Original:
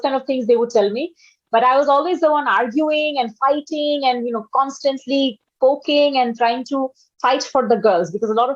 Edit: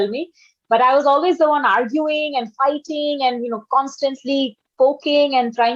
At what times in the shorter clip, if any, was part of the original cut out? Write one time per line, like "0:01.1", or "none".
none

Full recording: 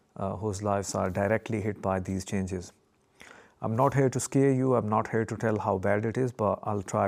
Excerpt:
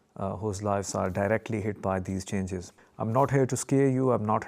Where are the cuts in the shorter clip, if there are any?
0:02.8

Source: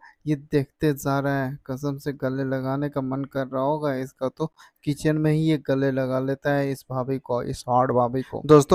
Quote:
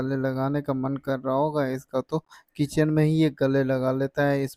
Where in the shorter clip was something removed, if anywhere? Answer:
none

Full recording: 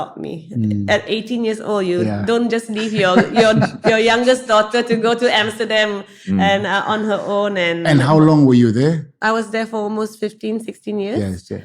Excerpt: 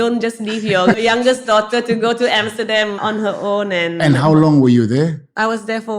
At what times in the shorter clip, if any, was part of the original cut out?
0:01.0
0:03.0

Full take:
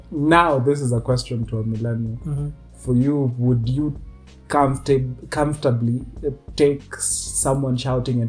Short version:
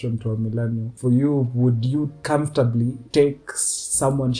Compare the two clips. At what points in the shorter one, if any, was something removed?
0:00.9
0:02.2
0:03.0

